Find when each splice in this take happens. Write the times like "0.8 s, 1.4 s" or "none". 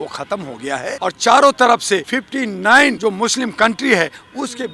0.9 s, 2.1 s, 3.0 s